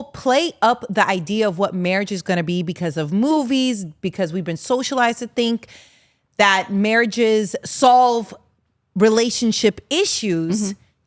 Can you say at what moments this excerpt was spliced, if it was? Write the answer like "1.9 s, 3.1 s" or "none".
none